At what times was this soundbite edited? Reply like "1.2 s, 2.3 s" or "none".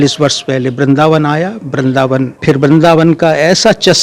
2.4 s